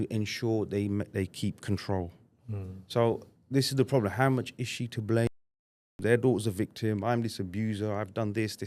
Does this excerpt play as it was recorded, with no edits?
no; 1 cut; at 6.0 s

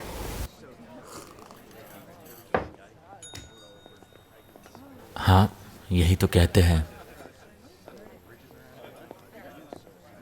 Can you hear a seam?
no; 0 cuts

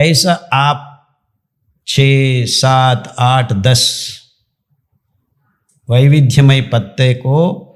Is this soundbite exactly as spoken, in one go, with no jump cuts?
yes; 0 cuts

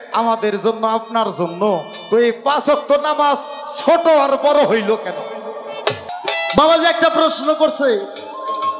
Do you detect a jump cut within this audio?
yes; 1 cut; at 6.1 s

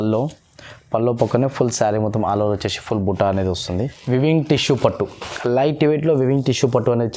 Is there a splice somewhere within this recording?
yes; 1 cut; at 4.0 s

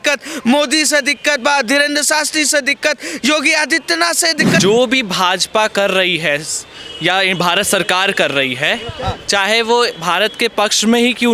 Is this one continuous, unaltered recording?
no; 1 cut; at 4.6 s

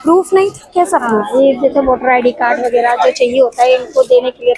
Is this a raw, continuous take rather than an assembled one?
yes; 0 cuts

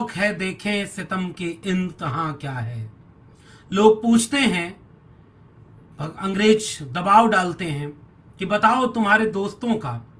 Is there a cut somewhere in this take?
no; 0 cuts

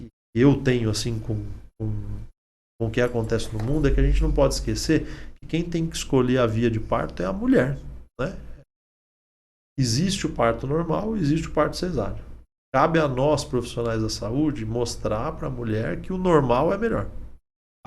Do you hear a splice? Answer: no; 0 cuts

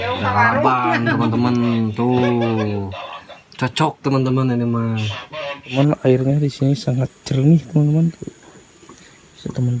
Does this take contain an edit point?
yes; 1 cut; at 5.8 s

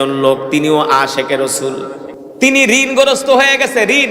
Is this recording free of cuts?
no; 1 cut; at 2.1 s

